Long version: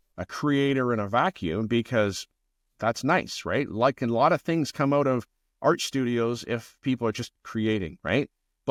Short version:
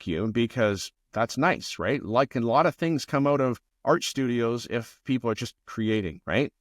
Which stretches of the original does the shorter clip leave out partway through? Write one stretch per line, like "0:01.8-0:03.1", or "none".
0:02.3-0:02.6
0:05.3-0:05.5